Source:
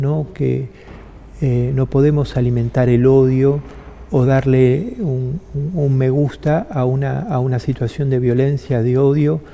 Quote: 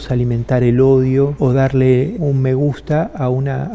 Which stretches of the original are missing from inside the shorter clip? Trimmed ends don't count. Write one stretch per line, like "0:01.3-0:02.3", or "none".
0:03.6-0:04.1
0:04.9-0:05.7